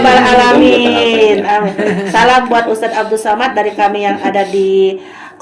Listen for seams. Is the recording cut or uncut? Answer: uncut